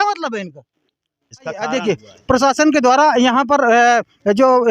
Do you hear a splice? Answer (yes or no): yes